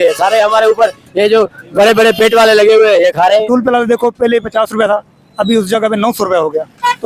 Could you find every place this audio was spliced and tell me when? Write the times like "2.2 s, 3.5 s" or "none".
3.5 s